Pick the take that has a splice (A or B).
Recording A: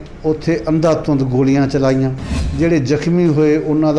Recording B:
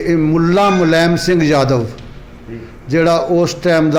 A